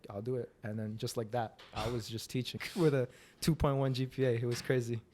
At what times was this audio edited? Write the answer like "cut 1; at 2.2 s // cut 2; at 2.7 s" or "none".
cut 1; at 2.6 s